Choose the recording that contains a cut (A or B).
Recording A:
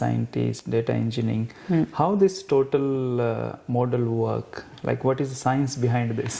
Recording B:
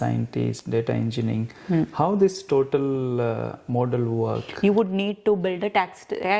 B